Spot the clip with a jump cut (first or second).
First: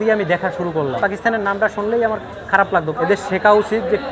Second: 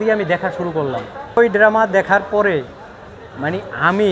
first